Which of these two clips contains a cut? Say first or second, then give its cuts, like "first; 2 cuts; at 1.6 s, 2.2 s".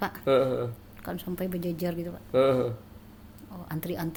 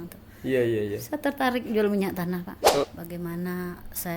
second; 1 cut; at 2.8 s